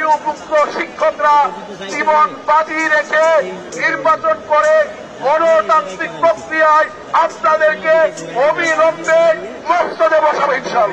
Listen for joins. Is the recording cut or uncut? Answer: uncut